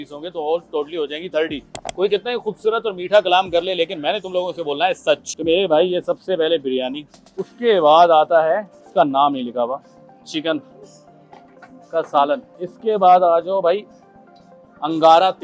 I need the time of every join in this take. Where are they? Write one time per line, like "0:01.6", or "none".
0:05.3
0:12.5